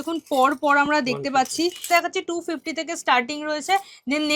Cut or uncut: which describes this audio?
cut